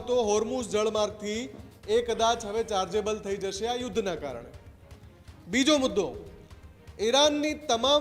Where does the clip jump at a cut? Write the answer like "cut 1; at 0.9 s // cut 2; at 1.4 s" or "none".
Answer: none